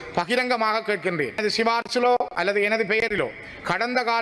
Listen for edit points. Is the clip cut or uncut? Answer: cut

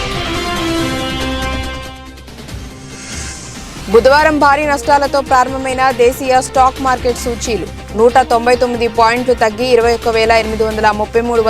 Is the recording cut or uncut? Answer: uncut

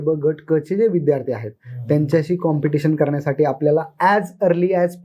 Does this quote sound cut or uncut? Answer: uncut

